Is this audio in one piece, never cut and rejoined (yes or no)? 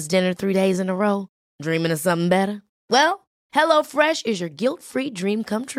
yes